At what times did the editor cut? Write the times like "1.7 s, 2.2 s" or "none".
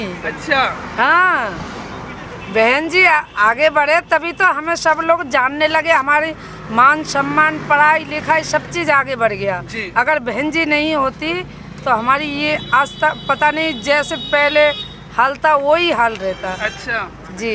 none